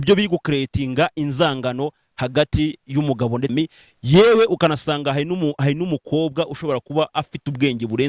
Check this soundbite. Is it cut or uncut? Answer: cut